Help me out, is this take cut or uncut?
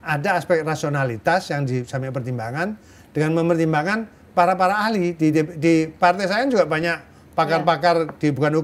uncut